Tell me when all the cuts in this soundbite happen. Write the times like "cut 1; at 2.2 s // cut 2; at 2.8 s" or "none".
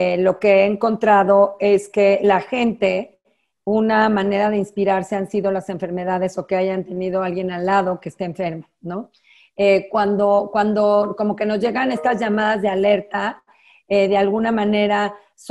none